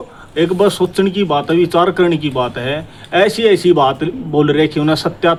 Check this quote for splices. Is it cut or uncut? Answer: uncut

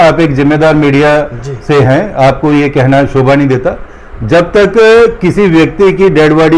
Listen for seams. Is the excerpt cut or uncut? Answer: uncut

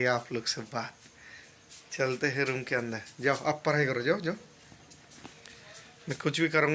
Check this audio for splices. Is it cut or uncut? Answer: uncut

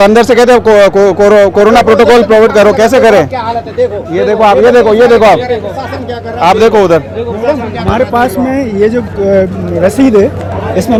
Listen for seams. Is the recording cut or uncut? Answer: uncut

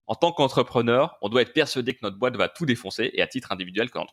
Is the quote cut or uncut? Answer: uncut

